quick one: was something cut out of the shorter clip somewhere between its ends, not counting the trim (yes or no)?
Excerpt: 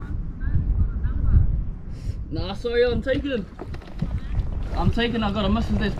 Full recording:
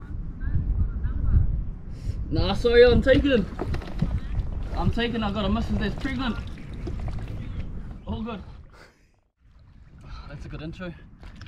no